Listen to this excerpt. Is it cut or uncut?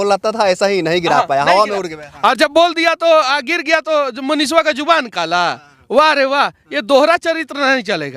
uncut